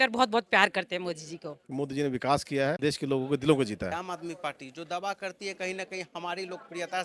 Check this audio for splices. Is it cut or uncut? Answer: cut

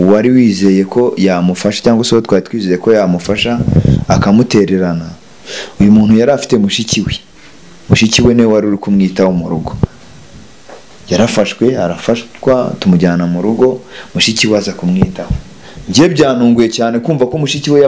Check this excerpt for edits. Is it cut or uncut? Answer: uncut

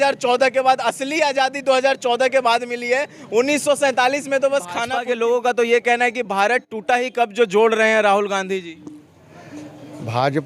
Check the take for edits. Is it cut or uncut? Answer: cut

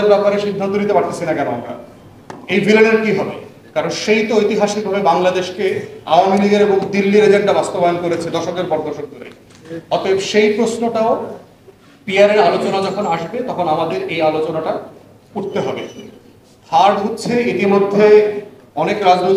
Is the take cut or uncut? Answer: uncut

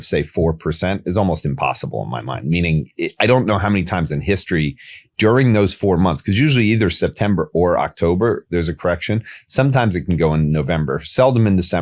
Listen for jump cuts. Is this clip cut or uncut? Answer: uncut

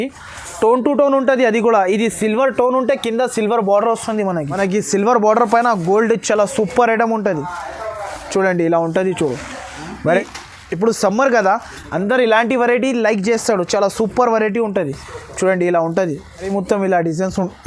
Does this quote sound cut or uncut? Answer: cut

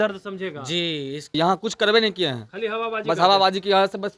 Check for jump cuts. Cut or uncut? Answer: cut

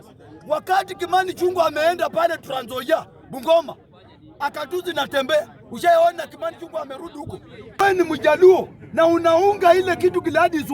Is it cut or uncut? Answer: cut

